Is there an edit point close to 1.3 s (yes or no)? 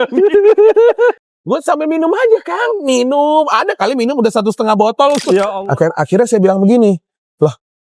yes